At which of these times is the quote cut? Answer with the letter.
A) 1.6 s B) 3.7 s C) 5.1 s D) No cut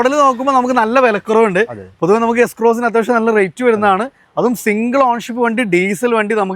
D